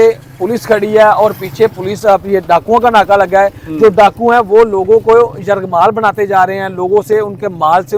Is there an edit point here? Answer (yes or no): no